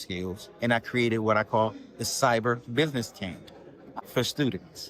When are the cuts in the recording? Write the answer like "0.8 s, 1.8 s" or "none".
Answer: 4.0 s